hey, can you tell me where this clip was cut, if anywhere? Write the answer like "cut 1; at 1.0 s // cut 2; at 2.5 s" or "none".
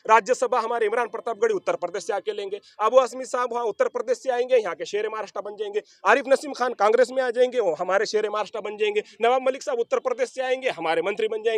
none